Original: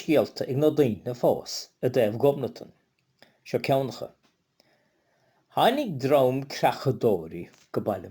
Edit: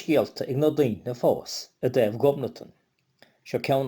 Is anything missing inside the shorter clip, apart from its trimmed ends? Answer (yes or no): no